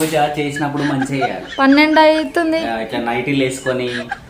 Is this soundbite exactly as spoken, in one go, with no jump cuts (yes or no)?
yes